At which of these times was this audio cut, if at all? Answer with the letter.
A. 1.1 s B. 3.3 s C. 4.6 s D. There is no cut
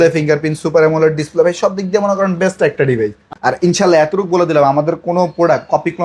B